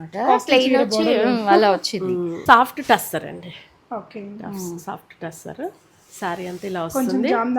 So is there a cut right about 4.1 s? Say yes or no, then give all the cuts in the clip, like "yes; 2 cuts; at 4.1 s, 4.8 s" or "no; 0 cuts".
no; 1 cut; at 2.4 s